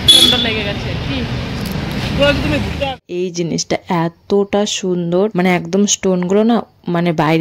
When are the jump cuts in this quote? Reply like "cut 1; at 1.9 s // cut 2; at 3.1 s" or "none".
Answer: cut 1; at 2.8 s

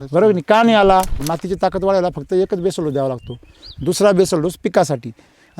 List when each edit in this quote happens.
cut 1; at 1.2 s

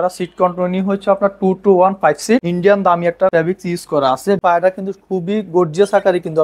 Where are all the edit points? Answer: cut 1; at 2.5 s // cut 2; at 3.3 s // cut 3; at 4.4 s

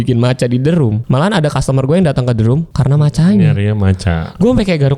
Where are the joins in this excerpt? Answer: cut 1; at 1.0 s // cut 2; at 2.7 s

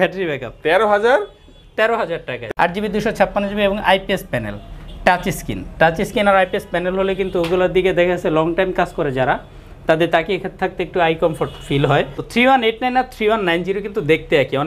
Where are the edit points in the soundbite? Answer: cut 1; at 2.4 s // cut 2; at 12.2 s

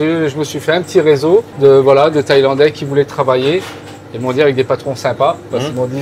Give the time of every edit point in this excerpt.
none

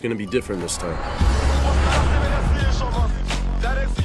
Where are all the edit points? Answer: none

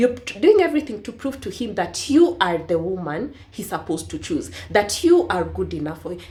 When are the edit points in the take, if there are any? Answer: none

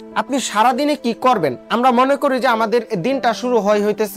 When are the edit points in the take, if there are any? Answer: none

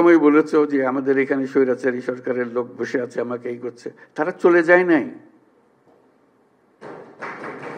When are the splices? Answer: none

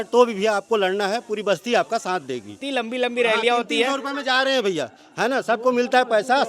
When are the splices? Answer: cut 1; at 2.6 s

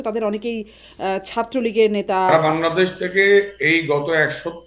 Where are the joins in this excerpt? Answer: cut 1; at 2.3 s

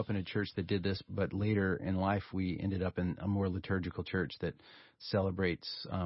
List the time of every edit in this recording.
cut 1; at 1.0 s // cut 2; at 2.3 s // cut 3; at 5.0 s

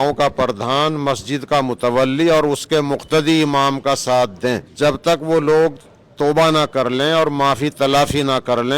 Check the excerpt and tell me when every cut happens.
cut 1; at 4.7 s

